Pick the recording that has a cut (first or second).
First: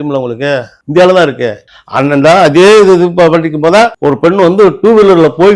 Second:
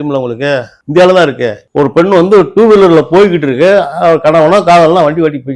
second